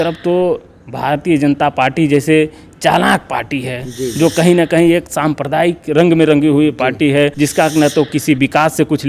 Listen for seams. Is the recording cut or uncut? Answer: cut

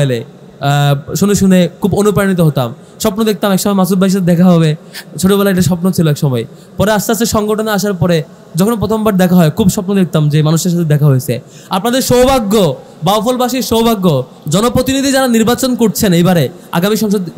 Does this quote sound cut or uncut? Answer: cut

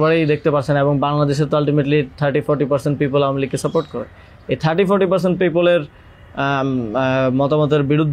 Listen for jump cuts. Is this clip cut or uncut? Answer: uncut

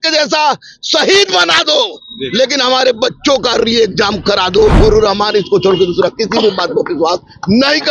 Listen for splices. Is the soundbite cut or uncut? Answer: cut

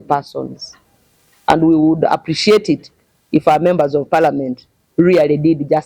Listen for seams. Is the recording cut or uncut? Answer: uncut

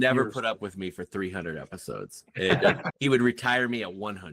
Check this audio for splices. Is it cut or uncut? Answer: cut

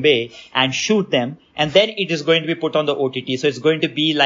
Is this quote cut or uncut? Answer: uncut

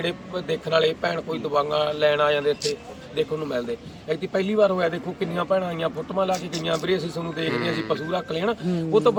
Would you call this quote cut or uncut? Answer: uncut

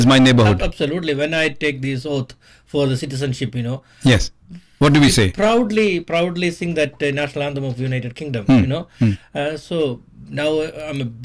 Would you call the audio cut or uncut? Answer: cut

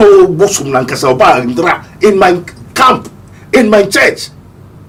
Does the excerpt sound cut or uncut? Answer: uncut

